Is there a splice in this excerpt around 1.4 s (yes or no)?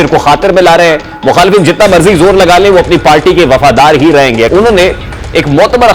no